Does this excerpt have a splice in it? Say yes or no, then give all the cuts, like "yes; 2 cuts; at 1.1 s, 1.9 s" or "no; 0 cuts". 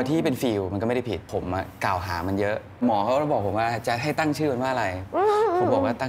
yes; 2 cuts; at 1.3 s, 2.8 s